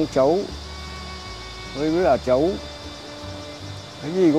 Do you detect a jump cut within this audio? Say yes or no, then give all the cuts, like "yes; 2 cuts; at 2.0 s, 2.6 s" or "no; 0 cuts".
no; 0 cuts